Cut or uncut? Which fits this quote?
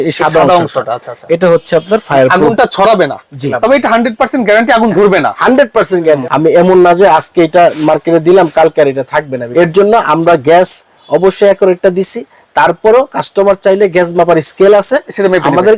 cut